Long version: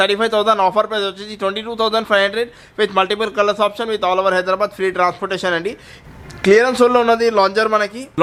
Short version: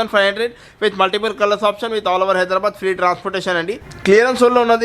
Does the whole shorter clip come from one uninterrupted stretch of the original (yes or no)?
no